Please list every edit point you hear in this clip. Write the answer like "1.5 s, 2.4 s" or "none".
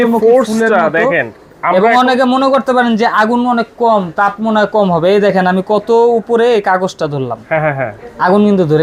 none